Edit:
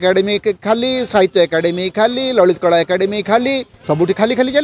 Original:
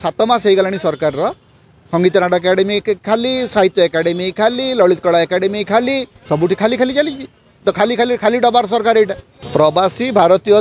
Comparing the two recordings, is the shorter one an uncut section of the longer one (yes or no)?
yes